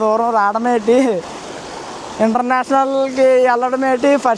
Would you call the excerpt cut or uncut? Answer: uncut